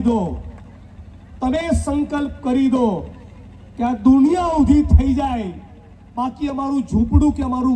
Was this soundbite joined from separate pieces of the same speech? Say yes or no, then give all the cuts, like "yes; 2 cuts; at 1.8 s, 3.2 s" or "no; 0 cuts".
no; 0 cuts